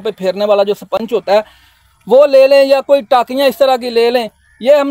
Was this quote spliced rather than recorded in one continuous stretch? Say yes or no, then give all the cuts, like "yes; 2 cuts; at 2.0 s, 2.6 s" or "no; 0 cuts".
no; 0 cuts